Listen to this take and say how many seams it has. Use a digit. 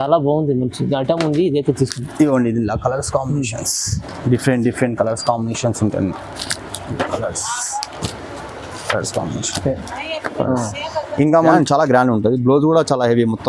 1